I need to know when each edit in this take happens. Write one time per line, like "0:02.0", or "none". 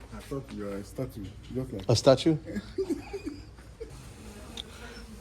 0:03.9